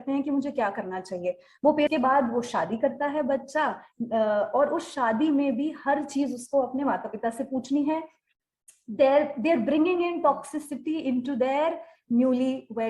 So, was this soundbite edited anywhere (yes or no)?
yes